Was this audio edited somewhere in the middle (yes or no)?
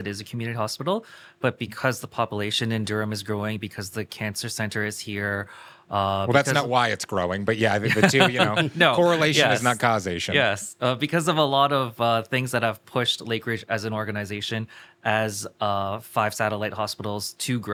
no